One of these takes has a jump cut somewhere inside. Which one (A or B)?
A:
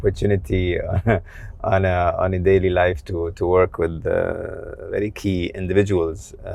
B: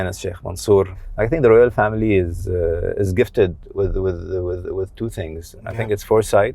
B